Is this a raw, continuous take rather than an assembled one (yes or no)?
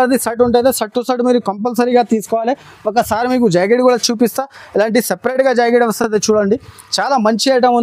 yes